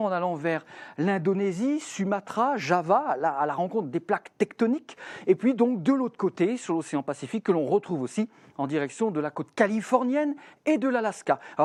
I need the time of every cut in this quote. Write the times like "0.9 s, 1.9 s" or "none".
none